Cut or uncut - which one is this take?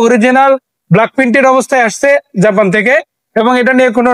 uncut